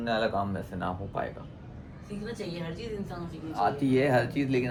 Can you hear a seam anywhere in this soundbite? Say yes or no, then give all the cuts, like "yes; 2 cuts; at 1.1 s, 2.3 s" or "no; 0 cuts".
no; 0 cuts